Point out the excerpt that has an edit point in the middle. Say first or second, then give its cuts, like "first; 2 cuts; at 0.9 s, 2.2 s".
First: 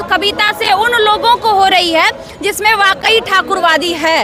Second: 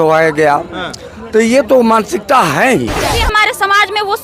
second; 1 cut; at 3.2 s